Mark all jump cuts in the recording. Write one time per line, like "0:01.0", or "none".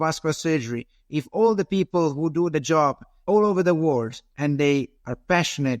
0:03.1
0:04.7